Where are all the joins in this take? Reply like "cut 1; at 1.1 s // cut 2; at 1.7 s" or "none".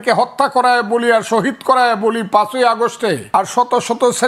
cut 1; at 3.2 s